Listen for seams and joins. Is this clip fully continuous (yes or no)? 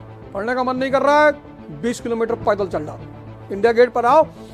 yes